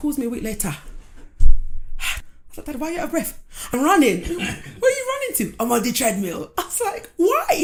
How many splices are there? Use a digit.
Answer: 0